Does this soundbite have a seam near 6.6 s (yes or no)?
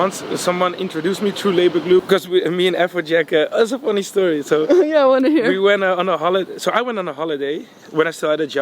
no